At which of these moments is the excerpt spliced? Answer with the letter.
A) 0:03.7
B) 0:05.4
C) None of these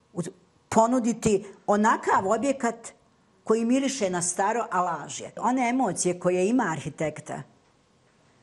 B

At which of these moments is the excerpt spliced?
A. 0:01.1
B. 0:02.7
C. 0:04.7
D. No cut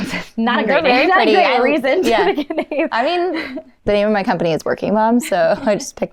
D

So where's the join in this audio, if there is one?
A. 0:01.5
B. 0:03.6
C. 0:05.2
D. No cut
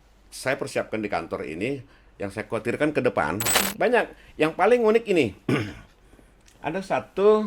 B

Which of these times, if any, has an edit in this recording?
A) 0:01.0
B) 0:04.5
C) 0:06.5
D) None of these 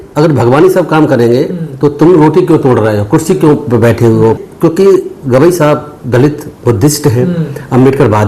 B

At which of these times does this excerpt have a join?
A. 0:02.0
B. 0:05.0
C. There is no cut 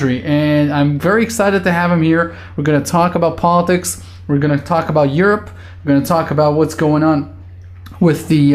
B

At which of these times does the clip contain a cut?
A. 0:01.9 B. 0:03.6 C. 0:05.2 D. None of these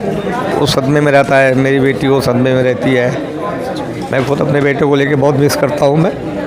D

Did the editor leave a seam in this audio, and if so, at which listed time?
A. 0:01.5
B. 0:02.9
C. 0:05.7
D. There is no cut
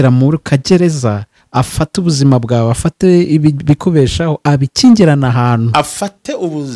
D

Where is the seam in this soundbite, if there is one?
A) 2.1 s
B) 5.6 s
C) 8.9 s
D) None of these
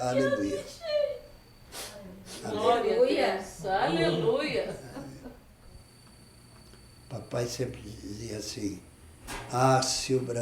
B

